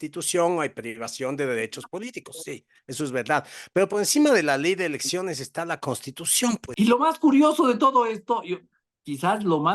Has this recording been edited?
yes; 1 cut; at 6.7 s

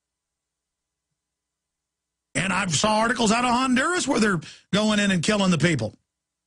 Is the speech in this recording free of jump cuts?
no; 1 cut; at 5.2 s

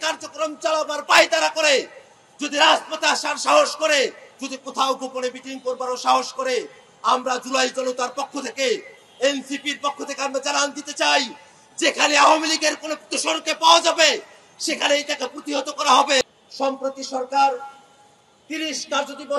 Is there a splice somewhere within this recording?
yes; 1 cut; at 16.2 s

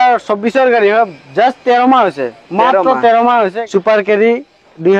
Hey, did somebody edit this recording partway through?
yes; 1 cut; at 3.5 s

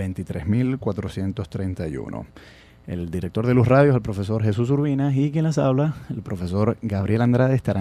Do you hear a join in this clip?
no; 0 cuts

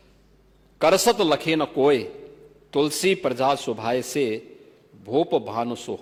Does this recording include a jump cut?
no; 0 cuts

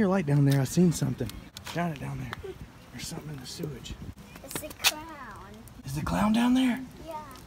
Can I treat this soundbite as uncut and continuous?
no; 3 cuts; at 1.6 s, 4.2 s, 5.7 s

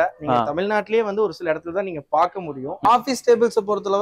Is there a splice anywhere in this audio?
yes; 1 cut; at 2.7 s

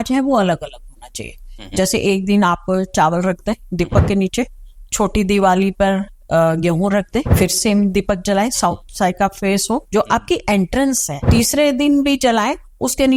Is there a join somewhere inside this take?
yes; 2 cuts; at 7.3 s, 11.1 s

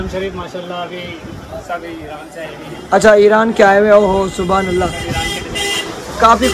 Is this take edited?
no; 0 cuts

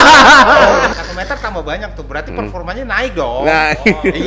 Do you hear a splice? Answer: yes; 1 cut; at 1.0 s

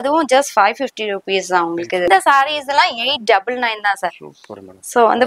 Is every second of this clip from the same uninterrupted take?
no; 1 cut; at 2.1 s

